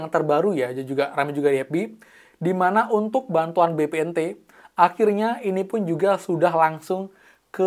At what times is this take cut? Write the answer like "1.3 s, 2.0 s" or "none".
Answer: none